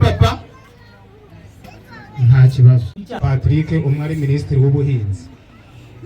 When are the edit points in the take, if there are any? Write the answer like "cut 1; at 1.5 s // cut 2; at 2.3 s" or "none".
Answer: cut 1; at 3.2 s